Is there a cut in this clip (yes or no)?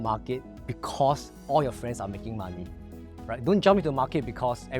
no